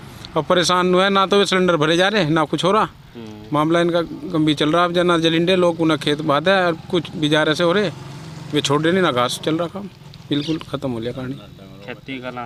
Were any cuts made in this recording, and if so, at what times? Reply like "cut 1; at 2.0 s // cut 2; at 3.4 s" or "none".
none